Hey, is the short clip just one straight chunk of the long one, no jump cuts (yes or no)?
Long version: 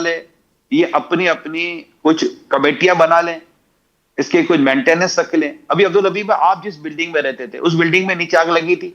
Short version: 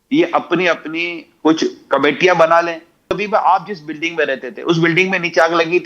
no